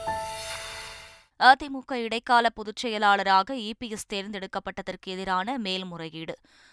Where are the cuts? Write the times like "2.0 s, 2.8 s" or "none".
1.2 s